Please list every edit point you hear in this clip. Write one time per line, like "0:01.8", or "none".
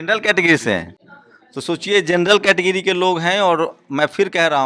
none